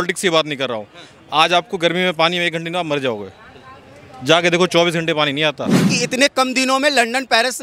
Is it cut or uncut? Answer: cut